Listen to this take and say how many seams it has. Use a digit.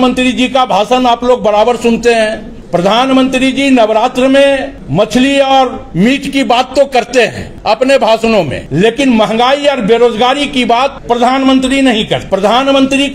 7